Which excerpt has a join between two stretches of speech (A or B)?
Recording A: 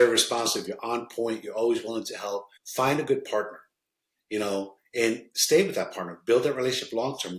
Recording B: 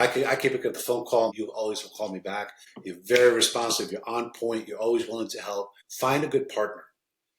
B